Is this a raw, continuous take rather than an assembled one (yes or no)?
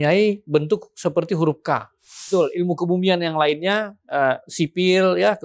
no